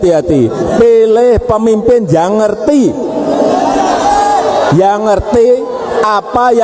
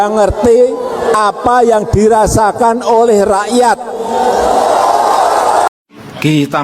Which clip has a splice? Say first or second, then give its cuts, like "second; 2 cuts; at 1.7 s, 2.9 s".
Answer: second; 1 cut; at 5.7 s